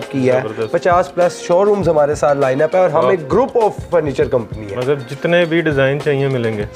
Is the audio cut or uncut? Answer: uncut